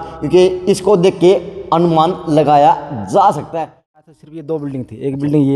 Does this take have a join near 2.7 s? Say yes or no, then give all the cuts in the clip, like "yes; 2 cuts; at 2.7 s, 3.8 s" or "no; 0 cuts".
no; 1 cut; at 4.1 s